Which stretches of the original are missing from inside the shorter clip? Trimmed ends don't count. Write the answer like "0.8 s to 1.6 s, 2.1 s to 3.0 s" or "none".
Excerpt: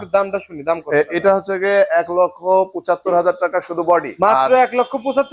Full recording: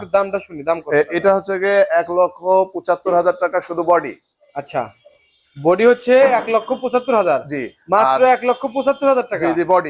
4.1 s to 7.8 s